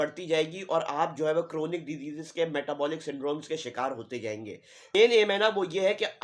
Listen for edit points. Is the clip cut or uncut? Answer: cut